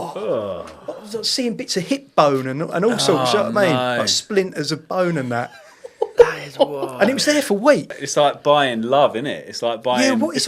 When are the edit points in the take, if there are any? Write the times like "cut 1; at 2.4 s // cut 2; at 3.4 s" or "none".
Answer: cut 1; at 7.9 s